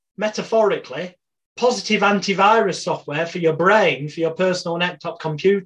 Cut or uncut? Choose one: uncut